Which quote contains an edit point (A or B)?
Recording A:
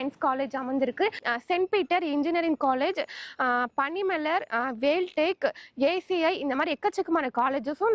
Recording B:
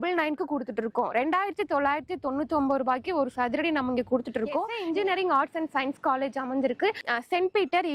B